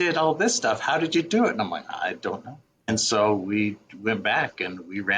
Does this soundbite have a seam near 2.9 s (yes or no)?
yes